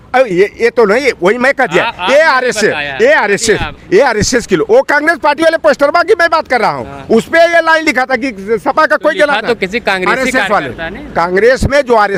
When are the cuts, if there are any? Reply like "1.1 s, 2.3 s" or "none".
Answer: none